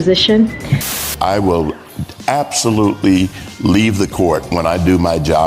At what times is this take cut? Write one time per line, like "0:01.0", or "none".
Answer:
0:00.9